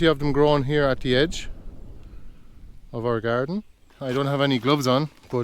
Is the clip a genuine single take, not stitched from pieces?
no; 1 cut; at 3.9 s

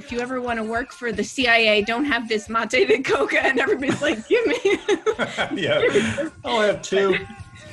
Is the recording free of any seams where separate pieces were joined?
no; 1 cut; at 1.1 s

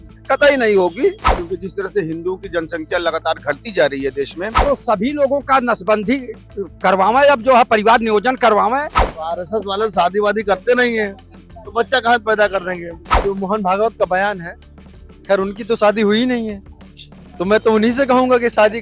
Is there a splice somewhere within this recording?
yes; 4 cuts; at 1.3 s, 4.5 s, 9.0 s, 13.2 s

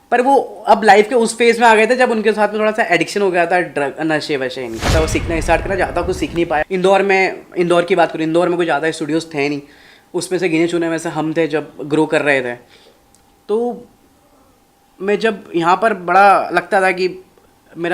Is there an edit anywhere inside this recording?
yes; 1 cut; at 6.6 s

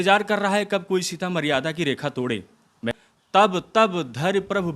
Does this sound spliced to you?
yes; 1 cut; at 2.9 s

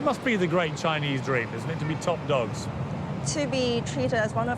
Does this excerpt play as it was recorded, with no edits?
yes; 0 cuts

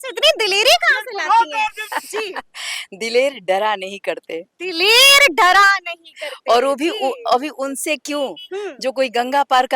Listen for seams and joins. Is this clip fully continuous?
no; 1 cut; at 1.8 s

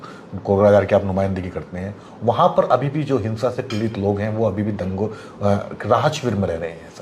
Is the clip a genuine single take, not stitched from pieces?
yes; 0 cuts

